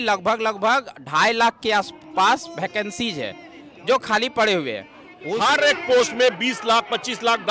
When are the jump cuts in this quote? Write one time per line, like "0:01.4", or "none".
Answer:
0:05.2